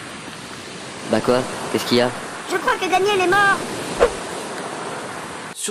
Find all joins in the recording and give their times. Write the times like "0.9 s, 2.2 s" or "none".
none